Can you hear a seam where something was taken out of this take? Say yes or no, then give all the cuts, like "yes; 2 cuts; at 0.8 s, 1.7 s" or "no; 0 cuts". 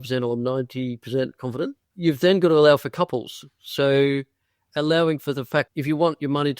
yes; 2 cuts; at 1.8 s, 5.7 s